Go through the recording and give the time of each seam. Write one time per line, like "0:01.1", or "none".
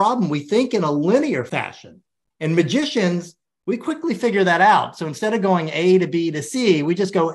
0:01.5